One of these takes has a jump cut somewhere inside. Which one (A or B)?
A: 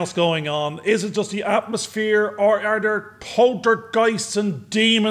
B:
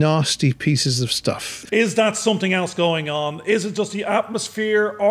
B